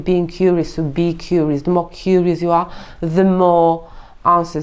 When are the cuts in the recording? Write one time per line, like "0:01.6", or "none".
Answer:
none